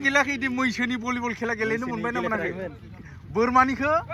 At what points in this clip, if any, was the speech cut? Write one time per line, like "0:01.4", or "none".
none